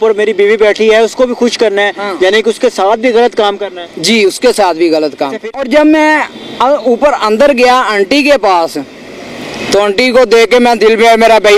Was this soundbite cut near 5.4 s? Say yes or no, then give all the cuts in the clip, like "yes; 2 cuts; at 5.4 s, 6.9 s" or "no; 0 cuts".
yes; 1 cut; at 5.4 s